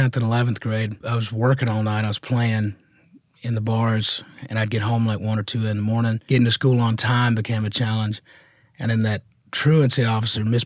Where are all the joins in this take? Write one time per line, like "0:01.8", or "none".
0:01.0
0:06.2